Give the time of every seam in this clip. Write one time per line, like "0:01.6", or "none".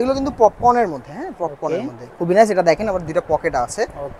0:02.1